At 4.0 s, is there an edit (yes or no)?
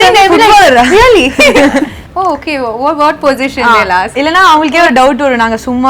no